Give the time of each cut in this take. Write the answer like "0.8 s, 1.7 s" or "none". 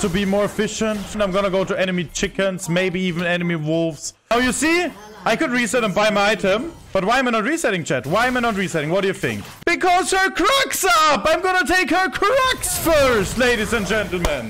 1.2 s, 4.3 s, 9.5 s